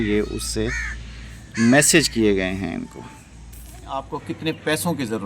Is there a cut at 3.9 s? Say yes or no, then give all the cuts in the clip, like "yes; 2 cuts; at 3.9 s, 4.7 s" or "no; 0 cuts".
yes; 1 cut; at 3.9 s